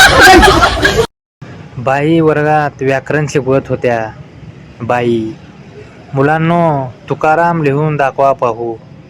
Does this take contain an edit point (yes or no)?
yes